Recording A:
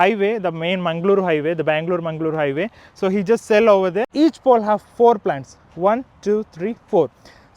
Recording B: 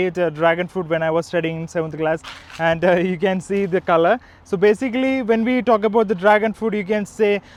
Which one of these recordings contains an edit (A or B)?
A